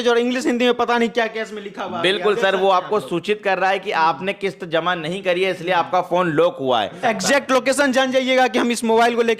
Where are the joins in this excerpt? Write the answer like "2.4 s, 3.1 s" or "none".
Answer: 7.0 s